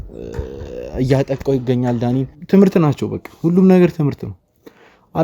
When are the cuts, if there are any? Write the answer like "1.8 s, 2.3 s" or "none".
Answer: 2.3 s